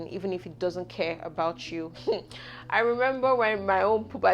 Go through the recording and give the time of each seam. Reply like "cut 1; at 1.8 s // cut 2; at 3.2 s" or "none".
cut 1; at 1.9 s

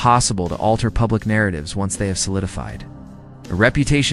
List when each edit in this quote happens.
cut 1; at 0.9 s // cut 2; at 2.1 s

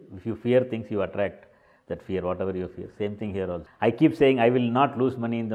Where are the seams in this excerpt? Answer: cut 1; at 3.7 s

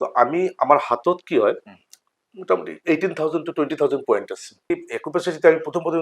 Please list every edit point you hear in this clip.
cut 1; at 4.7 s

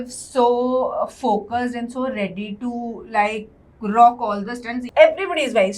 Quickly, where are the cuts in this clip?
cut 1; at 4.8 s

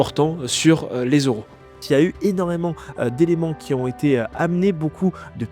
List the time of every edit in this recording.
cut 1; at 1.8 s

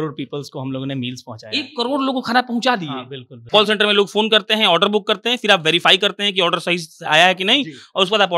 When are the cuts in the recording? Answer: cut 1; at 3.5 s

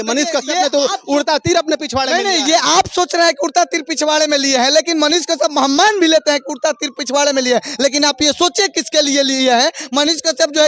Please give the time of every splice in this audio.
none

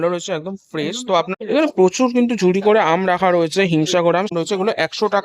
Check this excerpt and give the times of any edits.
cut 1; at 1.3 s // cut 2; at 4.3 s

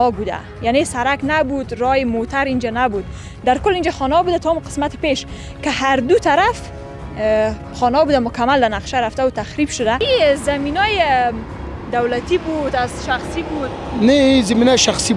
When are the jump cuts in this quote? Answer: cut 1; at 10.0 s

